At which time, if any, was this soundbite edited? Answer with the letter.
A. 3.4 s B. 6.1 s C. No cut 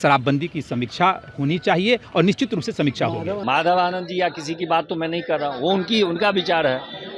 A